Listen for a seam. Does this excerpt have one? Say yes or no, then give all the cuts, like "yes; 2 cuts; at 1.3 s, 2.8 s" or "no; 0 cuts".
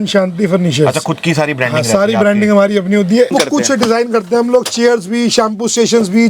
yes; 1 cut; at 3.3 s